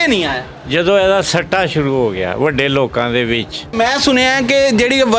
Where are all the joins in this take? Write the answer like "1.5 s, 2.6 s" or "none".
3.7 s